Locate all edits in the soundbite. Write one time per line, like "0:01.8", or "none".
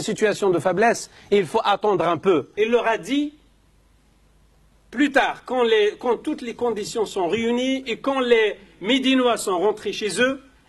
0:02.5

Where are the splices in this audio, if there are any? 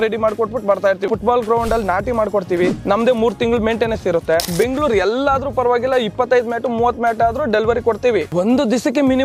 0:01.1
0:02.8
0:04.5
0:08.3

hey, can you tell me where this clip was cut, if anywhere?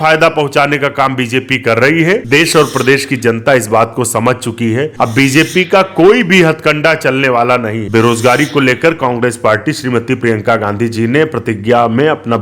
0:02.2
0:04.9
0:07.8

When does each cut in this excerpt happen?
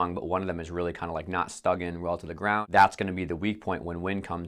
0:02.7

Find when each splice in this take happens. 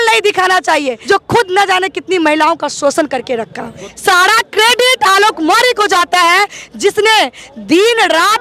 0:01.0
0:03.8

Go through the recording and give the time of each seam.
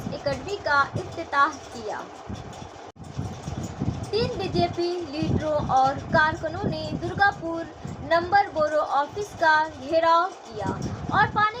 0:02.9

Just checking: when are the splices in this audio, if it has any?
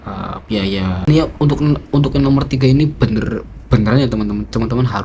0:01.1

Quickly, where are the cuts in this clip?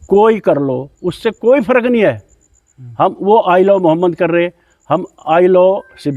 none

